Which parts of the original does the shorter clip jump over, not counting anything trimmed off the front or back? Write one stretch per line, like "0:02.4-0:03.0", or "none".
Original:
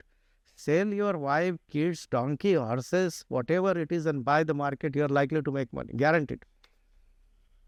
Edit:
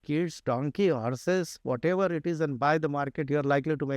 none